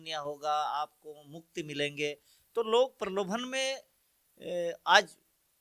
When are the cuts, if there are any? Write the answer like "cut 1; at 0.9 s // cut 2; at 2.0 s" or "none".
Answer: none